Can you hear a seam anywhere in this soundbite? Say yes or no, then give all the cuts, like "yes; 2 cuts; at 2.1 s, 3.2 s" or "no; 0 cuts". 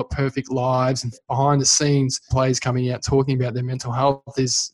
yes; 2 cuts; at 1.2 s, 2.3 s